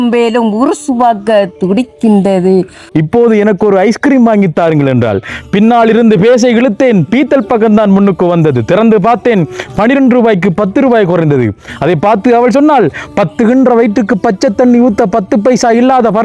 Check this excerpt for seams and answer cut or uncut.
cut